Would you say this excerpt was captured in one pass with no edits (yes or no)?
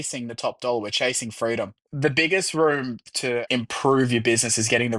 no